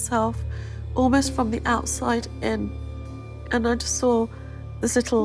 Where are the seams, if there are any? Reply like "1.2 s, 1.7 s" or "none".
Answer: none